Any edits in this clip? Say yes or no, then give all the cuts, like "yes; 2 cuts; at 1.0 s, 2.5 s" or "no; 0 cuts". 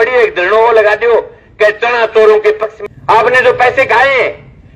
yes; 1 cut; at 2.7 s